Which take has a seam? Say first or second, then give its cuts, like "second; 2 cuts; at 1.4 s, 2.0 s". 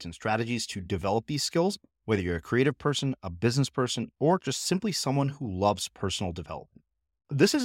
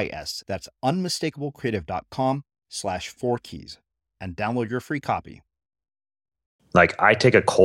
second; 1 cut; at 6.5 s